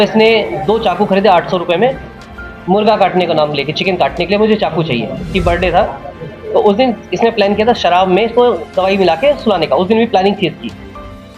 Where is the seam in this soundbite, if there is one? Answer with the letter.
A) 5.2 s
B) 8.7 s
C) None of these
A